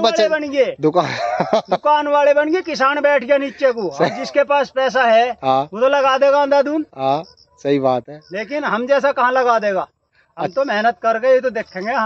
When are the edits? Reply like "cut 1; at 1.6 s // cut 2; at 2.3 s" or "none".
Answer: none